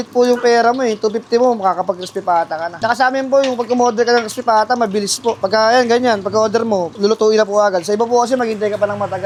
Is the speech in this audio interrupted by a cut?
no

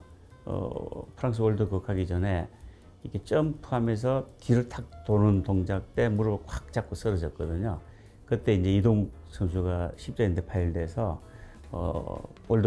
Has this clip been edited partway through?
no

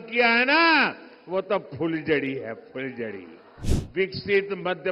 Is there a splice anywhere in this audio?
yes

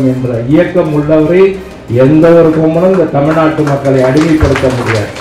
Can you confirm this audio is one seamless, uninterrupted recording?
yes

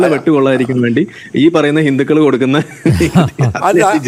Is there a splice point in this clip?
no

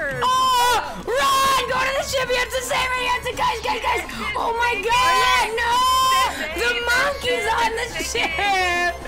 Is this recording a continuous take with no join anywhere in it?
no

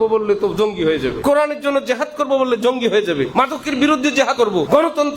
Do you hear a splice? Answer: yes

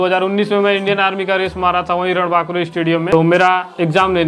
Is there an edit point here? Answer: yes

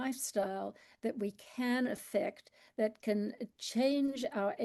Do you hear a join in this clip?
no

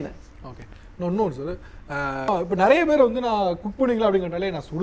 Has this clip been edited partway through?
yes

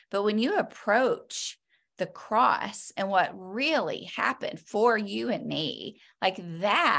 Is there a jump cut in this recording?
no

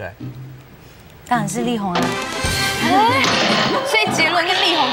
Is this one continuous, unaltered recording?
yes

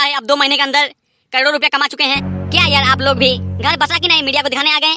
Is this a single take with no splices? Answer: no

